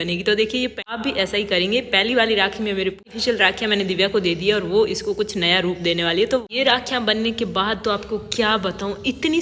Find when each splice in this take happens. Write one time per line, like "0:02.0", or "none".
0:00.9
0:03.0
0:06.4